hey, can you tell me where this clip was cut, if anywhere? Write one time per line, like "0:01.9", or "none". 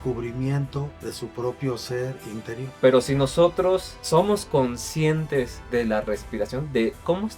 0:00.9
0:02.7
0:03.9
0:05.6

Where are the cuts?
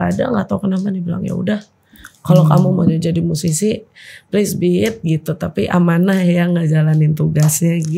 none

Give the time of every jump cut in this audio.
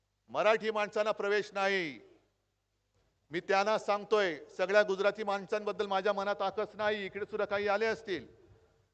none

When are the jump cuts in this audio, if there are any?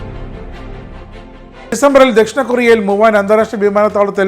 0:01.7

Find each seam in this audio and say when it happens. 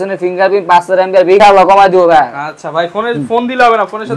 0:01.4

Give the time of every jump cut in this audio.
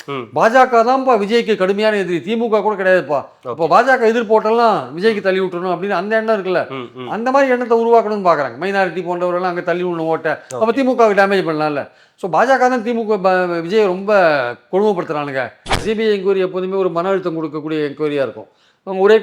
0:15.8

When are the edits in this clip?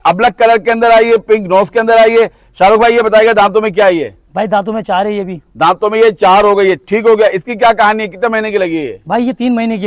none

